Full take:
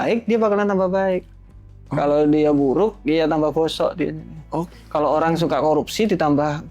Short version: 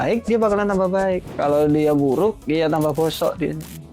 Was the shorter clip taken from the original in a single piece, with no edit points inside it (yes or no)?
no